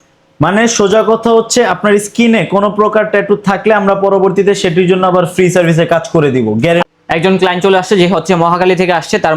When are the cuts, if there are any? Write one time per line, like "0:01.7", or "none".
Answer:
0:06.9